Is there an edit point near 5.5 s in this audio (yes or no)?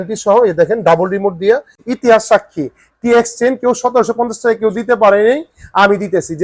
no